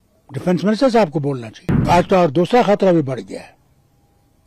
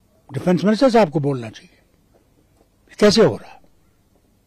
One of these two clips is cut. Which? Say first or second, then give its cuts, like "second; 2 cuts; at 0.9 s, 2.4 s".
first; 1 cut; at 1.8 s